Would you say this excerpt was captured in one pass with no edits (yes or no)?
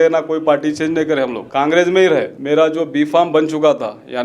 no